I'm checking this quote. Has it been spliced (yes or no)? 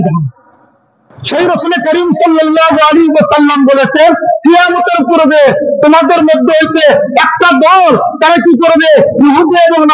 yes